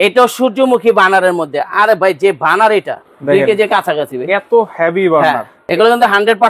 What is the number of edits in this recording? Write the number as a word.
two